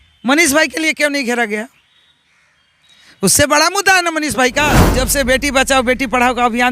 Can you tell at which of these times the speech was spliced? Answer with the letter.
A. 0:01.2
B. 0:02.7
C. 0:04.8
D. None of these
C